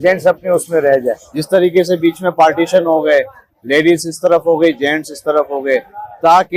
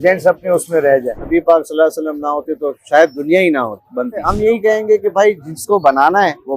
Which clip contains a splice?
second; 2 cuts; at 1.2 s, 4.3 s

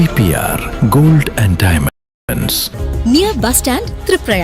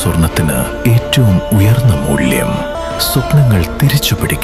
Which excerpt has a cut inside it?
first; 1 cut; at 2.5 s

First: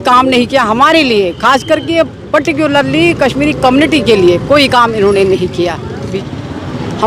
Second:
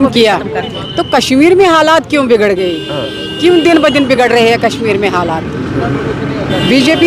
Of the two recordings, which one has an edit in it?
first; 1 cut; at 6.1 s

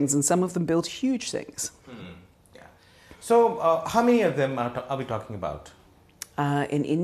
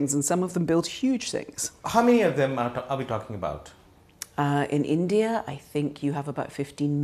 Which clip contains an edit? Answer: second; 1 cut; at 1.9 s

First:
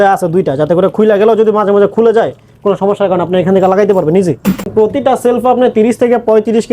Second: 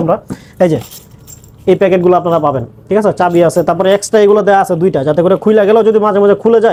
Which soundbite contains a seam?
first; 1 cut; at 4.7 s

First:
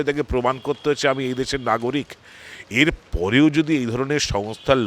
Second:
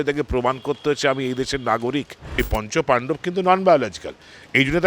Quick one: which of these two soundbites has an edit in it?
second; 1 cut; at 2.3 s

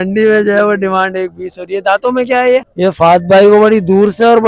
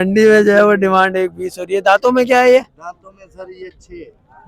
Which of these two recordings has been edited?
first; 1 cut; at 2.7 s

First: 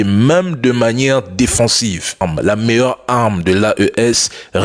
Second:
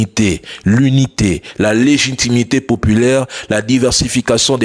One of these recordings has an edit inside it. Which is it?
first; 1 cut; at 2.2 s

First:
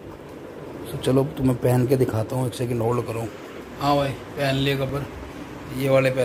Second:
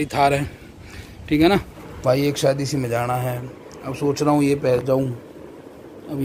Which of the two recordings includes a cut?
second; 1 cut; at 1.8 s

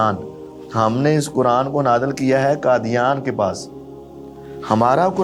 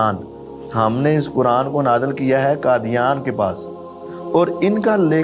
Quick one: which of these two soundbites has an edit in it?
second; 1 cut; at 4.1 s

